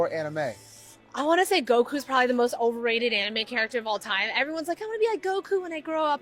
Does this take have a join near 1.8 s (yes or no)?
no